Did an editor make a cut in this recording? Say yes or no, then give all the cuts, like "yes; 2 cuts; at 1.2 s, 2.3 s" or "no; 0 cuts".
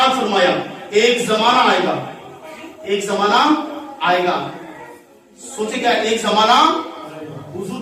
no; 0 cuts